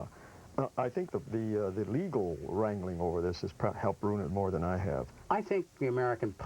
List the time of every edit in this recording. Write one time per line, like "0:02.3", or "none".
0:05.1